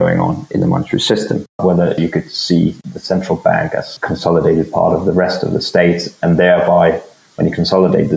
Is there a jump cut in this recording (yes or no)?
yes